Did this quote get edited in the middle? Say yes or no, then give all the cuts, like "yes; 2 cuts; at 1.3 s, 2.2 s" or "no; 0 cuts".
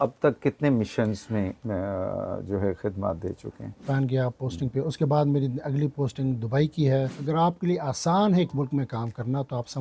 yes; 2 cuts; at 3.8 s, 7.2 s